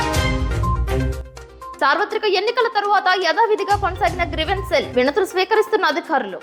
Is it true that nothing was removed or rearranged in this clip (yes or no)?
yes